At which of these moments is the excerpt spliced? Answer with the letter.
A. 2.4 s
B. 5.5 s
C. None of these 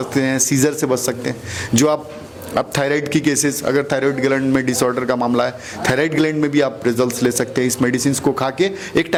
C